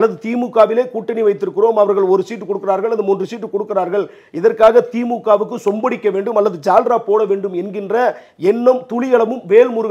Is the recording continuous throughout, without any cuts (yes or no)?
yes